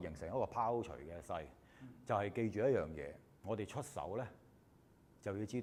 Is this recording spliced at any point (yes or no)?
no